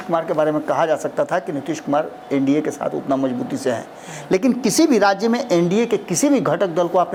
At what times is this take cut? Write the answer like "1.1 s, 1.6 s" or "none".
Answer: none